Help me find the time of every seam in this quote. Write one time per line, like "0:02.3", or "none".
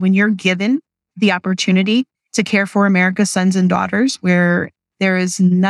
0:01.0